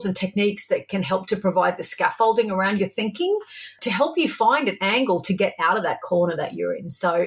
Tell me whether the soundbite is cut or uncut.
cut